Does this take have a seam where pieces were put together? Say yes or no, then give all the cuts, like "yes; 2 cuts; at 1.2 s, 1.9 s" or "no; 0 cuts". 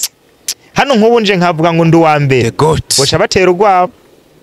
no; 0 cuts